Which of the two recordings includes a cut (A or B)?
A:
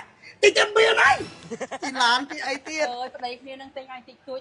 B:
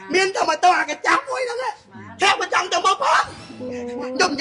A